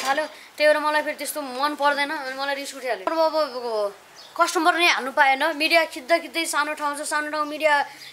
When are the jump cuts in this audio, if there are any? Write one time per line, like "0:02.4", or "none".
0:03.1